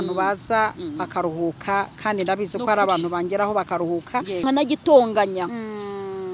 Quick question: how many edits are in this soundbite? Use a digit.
1